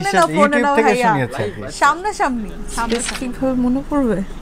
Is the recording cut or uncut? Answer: cut